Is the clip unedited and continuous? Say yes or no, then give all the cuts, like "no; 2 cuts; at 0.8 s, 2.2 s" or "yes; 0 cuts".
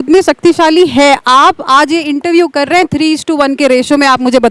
yes; 0 cuts